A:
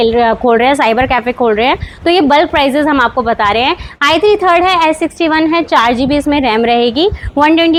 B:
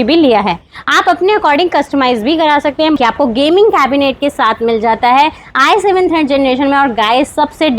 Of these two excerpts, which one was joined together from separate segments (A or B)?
B